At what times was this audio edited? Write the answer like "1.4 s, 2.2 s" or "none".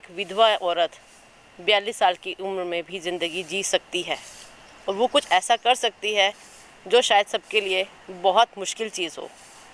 none